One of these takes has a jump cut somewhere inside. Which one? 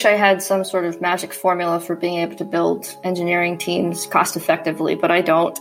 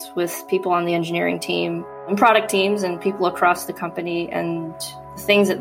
second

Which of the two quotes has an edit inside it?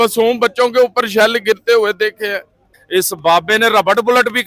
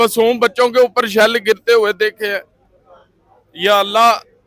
first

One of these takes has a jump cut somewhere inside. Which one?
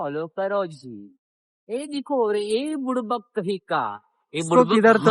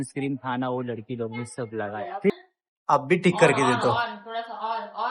second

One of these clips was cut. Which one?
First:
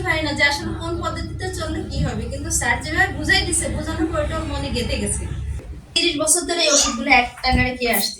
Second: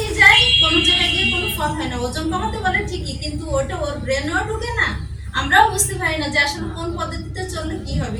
first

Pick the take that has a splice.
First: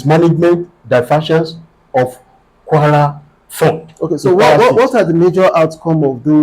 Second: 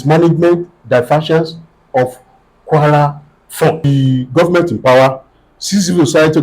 second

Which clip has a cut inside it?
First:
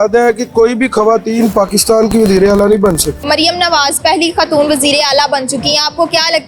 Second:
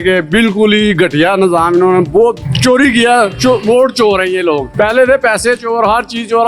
first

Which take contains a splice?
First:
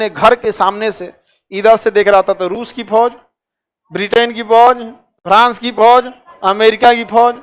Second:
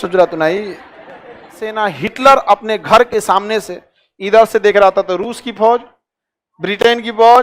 second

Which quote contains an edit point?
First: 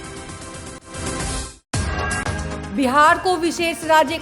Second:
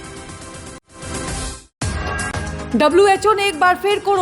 first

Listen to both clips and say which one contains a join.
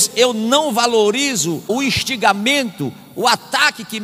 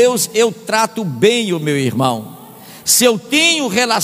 first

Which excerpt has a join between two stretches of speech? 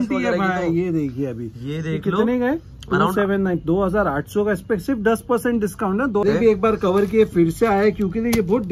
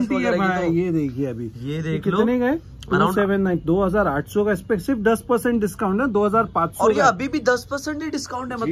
first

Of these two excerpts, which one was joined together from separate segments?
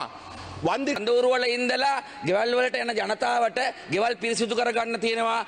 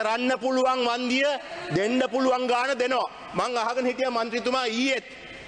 first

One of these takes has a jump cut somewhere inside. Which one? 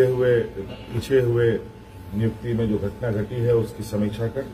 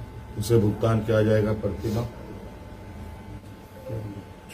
second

